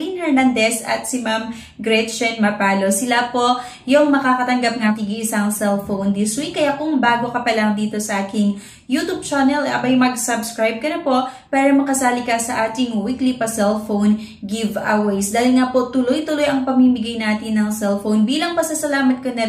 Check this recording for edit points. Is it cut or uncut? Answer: cut